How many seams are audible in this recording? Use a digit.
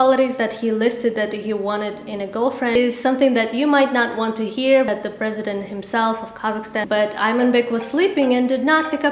3